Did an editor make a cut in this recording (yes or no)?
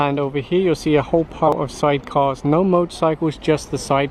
yes